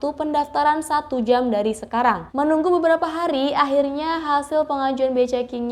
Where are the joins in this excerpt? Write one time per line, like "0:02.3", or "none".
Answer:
0:02.3